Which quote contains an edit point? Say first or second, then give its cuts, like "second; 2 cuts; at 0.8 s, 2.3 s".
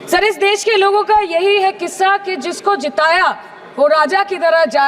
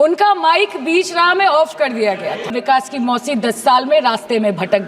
second; 1 cut; at 2.6 s